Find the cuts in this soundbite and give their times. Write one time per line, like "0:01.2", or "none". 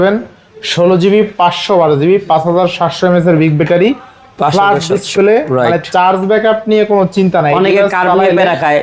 none

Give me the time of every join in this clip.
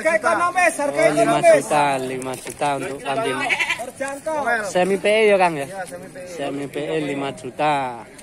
none

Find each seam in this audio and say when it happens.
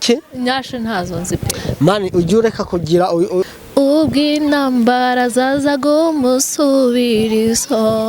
0:03.4

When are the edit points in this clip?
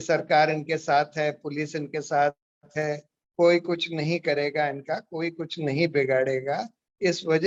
none

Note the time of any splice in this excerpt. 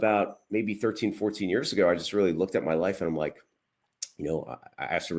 none

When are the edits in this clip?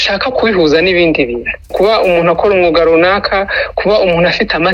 0:01.7

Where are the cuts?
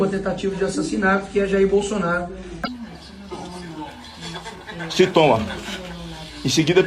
0:02.5

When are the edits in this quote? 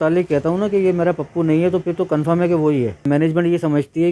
0:03.1

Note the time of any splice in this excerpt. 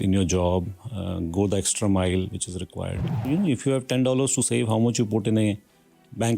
0:03.2

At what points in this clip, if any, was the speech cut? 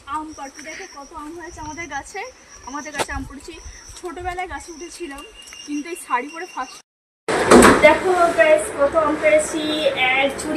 0:06.9

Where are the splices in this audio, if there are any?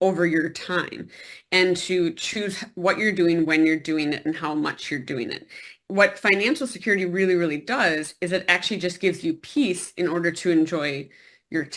0:05.7

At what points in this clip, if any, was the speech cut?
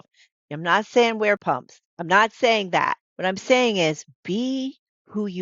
0:01.4
0:03.1

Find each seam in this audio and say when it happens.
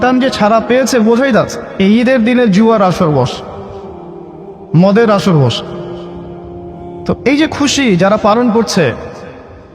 0:01.7

